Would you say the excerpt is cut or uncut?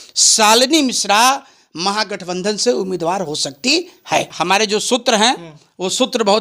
cut